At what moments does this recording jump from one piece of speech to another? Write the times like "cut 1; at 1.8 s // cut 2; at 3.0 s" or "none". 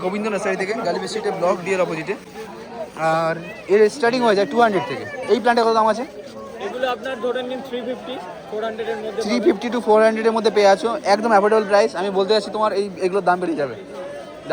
none